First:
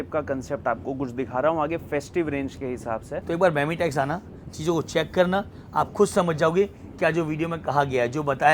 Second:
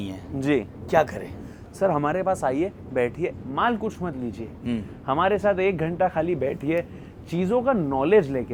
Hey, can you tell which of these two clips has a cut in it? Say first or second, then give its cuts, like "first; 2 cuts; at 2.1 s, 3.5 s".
first; 1 cut; at 3.1 s